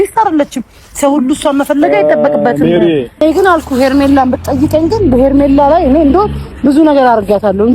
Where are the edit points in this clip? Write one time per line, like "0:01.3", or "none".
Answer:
0:03.2